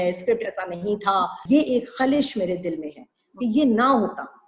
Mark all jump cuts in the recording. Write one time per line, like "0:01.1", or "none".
0:01.4

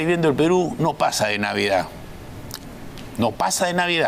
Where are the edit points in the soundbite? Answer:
none

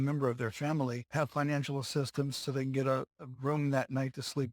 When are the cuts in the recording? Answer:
0:01.0

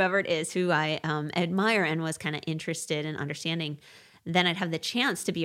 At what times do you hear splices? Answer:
none

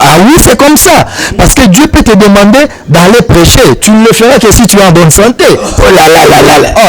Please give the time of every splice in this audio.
none

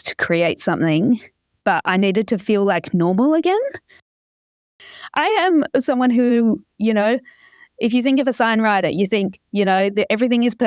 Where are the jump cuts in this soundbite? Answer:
0:04.5

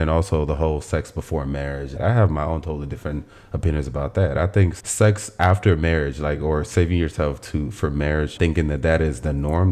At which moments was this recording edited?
0:01.9
0:04.8
0:08.3

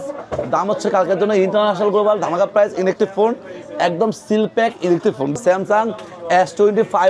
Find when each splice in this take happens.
0:05.3

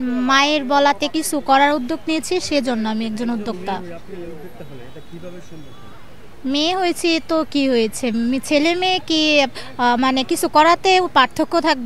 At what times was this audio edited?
none

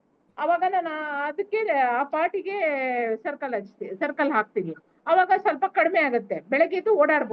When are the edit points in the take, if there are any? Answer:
none

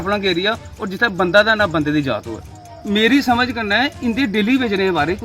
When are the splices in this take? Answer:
0:02.7

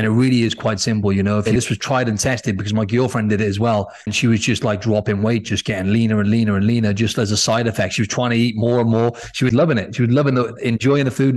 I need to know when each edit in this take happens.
0:01.5
0:04.0
0:09.5

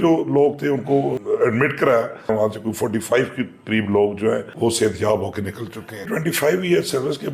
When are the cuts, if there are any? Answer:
0:01.2
0:02.3
0:04.5
0:06.0

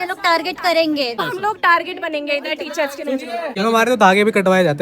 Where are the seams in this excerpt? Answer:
0:01.2
0:03.5

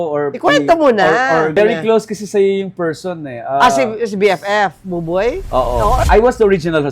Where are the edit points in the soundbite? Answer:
0:01.5
0:06.0

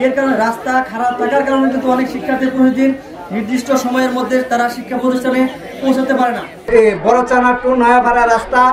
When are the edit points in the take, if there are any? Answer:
0:06.6

